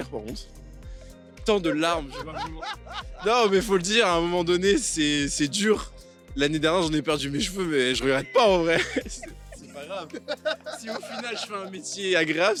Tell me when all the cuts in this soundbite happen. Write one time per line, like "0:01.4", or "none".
none